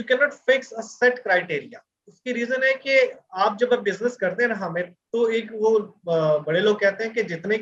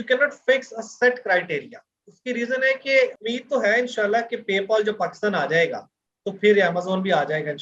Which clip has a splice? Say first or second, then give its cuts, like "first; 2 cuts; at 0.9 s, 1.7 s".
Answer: second; 1 cut; at 3.2 s